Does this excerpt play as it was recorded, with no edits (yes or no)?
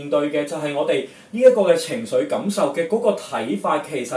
yes